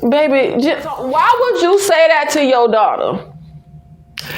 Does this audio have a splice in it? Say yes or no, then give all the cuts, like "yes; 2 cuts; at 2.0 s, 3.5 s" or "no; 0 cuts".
yes; 1 cut; at 1.0 s